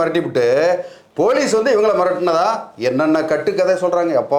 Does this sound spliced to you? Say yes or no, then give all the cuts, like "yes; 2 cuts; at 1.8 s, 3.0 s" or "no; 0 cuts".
no; 0 cuts